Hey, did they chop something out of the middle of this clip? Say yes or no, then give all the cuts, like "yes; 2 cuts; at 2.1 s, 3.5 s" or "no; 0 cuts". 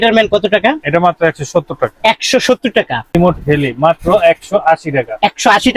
yes; 1 cut; at 3.1 s